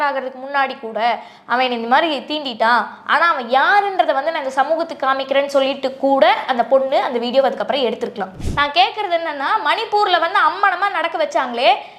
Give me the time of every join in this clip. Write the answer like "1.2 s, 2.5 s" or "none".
8.4 s